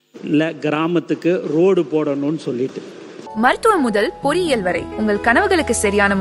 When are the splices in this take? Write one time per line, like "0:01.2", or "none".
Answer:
0:03.2